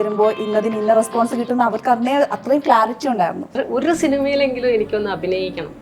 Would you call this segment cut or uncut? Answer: cut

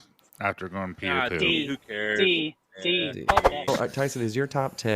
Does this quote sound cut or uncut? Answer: cut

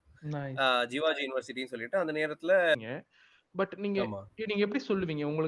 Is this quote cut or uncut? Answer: cut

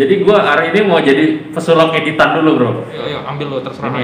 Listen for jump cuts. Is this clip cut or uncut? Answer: cut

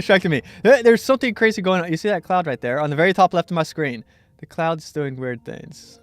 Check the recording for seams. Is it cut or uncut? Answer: cut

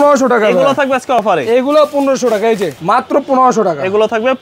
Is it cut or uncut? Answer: cut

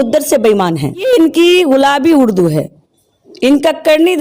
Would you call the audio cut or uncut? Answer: cut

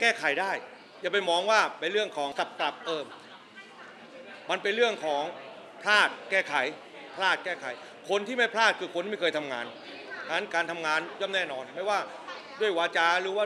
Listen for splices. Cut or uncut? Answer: cut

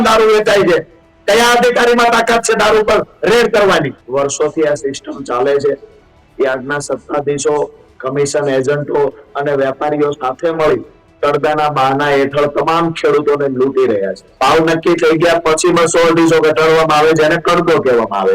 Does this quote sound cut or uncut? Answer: cut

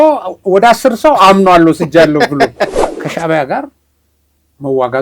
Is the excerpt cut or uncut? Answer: cut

